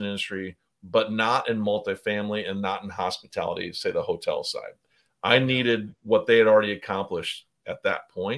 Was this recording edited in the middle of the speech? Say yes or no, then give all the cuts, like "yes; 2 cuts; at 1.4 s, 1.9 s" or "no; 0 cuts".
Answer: no; 0 cuts